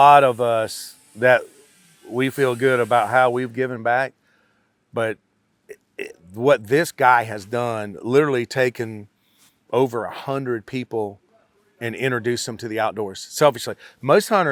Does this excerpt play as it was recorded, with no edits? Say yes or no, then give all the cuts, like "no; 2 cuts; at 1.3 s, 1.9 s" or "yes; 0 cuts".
yes; 0 cuts